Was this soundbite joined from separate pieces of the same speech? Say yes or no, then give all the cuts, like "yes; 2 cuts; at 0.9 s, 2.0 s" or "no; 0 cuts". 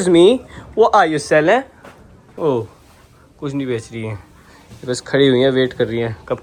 no; 0 cuts